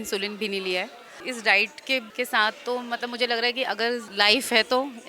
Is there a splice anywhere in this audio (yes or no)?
yes